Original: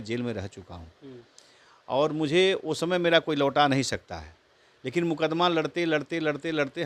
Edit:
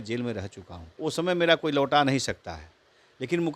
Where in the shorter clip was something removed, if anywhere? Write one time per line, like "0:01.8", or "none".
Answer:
0:01.0